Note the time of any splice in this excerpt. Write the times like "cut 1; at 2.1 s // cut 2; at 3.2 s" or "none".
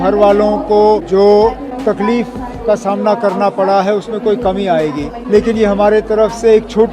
cut 1; at 1.0 s // cut 2; at 1.7 s // cut 3; at 5.1 s